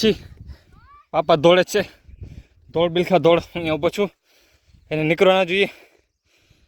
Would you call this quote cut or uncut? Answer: uncut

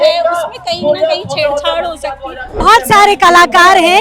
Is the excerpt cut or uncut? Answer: cut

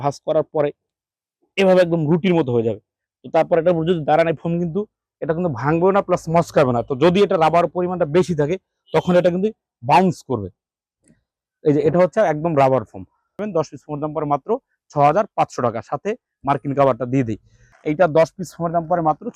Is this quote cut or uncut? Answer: cut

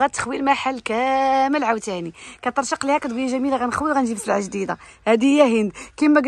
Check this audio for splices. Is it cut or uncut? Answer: uncut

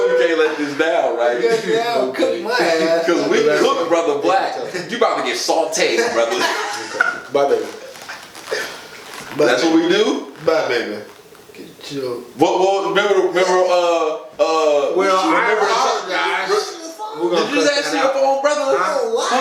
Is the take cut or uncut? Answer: uncut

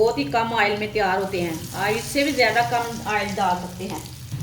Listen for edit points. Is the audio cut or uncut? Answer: uncut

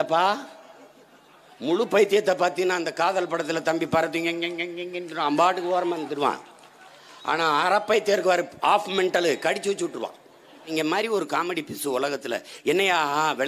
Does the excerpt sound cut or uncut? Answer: cut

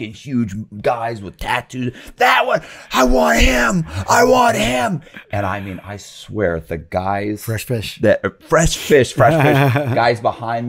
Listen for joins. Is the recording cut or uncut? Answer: uncut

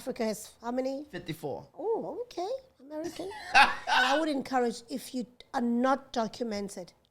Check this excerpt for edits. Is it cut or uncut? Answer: cut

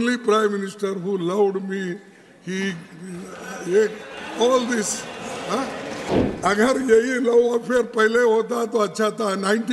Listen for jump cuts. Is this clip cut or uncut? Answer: cut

